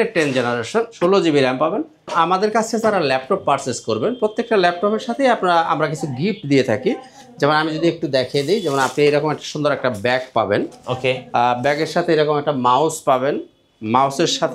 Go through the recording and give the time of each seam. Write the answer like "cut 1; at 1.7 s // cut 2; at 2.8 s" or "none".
cut 1; at 0.9 s // cut 2; at 2.1 s